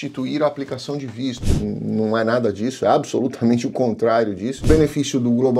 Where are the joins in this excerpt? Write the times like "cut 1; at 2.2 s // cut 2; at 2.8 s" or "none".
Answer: cut 1; at 1.5 s // cut 2; at 4.6 s